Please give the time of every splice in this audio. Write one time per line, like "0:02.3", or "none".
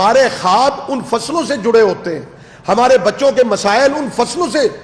none